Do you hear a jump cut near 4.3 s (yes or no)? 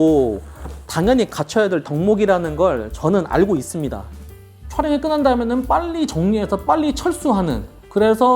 yes